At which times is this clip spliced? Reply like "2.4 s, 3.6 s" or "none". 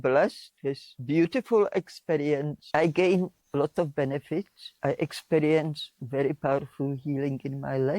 0.9 s, 2.6 s, 4.6 s